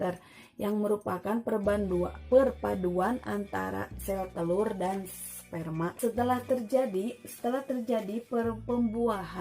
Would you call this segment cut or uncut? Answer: cut